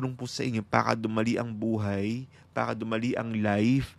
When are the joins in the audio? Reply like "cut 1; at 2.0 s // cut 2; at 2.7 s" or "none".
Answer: none

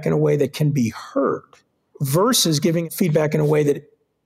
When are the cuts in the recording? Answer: cut 1; at 1.9 s // cut 2; at 2.9 s

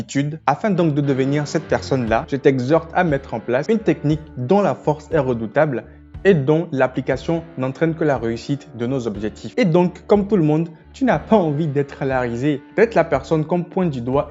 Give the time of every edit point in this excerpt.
cut 1; at 9.4 s

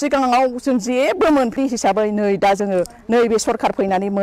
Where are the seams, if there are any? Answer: cut 1; at 1.6 s

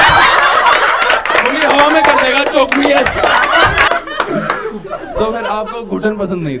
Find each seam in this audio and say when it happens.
cut 1; at 3.9 s // cut 2; at 5.1 s

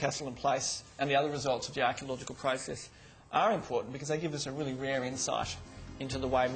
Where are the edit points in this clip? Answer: none

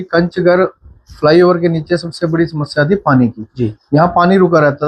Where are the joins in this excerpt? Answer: none

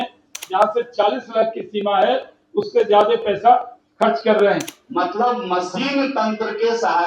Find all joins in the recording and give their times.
cut 1; at 4.8 s

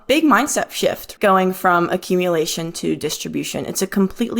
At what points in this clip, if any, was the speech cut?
cut 1; at 1.1 s

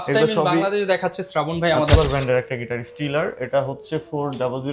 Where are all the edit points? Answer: cut 1; at 2.0 s

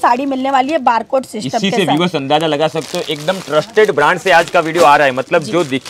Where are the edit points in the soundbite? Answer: none

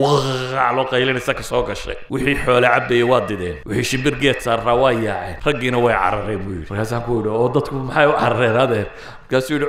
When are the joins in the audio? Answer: cut 1; at 1.9 s // cut 2; at 3.5 s // cut 3; at 5.3 s // cut 4; at 6.6 s

